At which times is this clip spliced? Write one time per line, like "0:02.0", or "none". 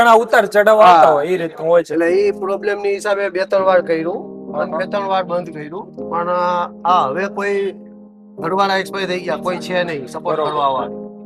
none